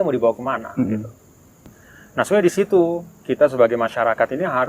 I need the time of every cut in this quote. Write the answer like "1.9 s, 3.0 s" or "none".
1.7 s